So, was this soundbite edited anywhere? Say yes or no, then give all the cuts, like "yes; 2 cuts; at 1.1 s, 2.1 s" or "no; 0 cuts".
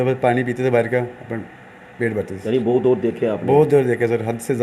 no; 0 cuts